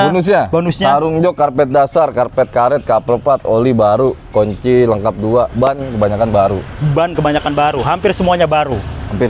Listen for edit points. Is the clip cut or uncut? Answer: uncut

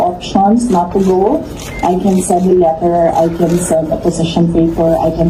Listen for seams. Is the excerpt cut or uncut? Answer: uncut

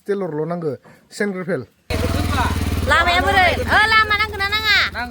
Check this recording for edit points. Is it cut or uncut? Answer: cut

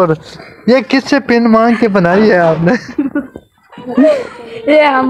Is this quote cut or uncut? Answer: uncut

